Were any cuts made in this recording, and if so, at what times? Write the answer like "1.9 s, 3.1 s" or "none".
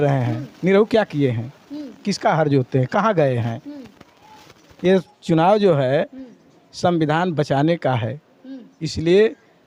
none